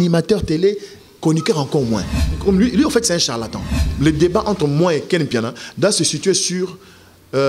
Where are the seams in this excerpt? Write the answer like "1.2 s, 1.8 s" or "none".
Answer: 2.3 s, 3.8 s